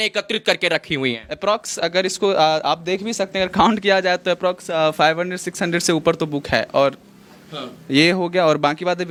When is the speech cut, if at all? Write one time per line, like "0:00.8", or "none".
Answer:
none